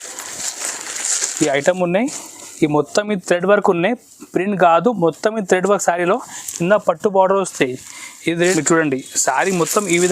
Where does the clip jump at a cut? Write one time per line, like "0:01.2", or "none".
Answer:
0:08.5